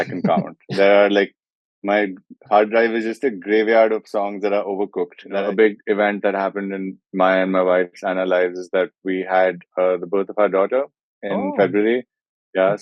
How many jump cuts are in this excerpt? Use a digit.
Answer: 1